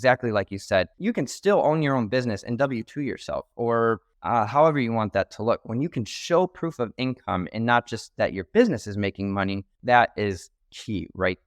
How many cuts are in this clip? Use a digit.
3